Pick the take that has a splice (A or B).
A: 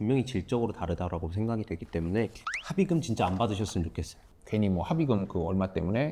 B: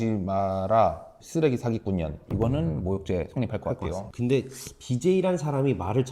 B